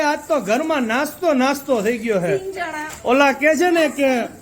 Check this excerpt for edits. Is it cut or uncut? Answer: uncut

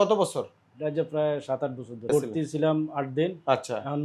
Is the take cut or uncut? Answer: cut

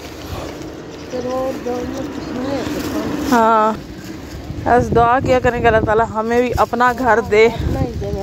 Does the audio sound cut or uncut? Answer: cut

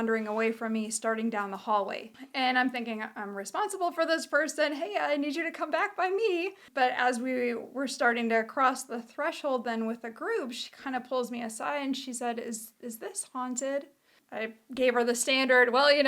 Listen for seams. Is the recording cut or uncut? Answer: cut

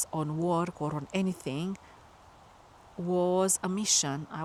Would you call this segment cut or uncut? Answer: uncut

